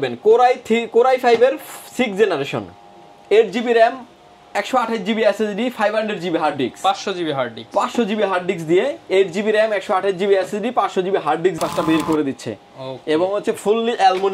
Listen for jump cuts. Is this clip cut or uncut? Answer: cut